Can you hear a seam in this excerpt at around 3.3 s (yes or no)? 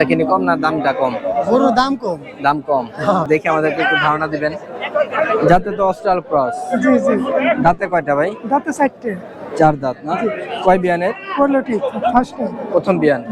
yes